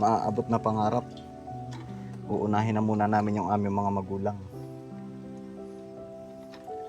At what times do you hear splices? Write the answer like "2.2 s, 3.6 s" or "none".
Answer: 4.4 s